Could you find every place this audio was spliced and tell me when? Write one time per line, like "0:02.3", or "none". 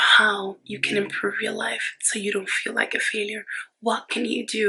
none